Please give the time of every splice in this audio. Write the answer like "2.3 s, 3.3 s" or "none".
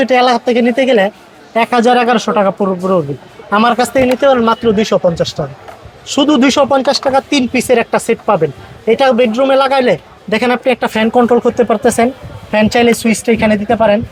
none

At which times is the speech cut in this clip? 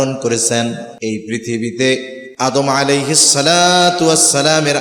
0.9 s, 2.2 s

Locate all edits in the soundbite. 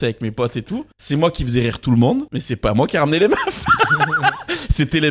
0.9 s, 2.4 s

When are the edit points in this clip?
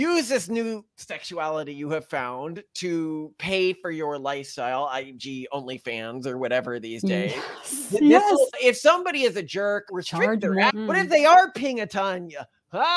8.5 s, 9.9 s, 10.7 s

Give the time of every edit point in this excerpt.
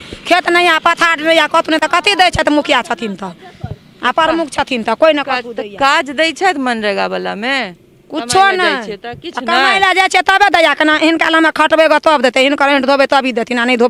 none

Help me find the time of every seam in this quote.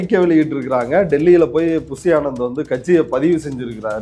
none

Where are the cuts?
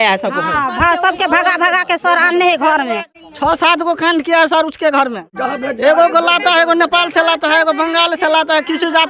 3.1 s, 5.3 s

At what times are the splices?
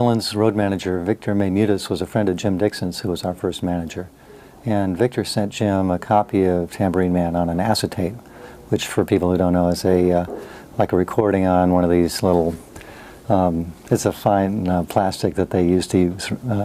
7.1 s

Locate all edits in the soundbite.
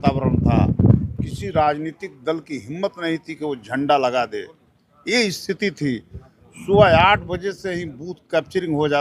none

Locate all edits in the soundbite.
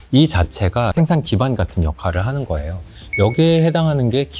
0.9 s

